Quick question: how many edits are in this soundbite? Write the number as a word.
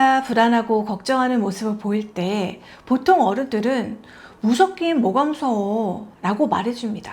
one